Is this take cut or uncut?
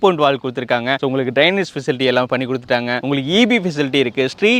cut